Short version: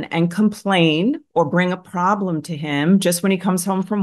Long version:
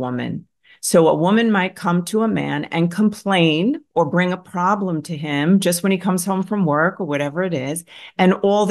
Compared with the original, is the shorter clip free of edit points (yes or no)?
yes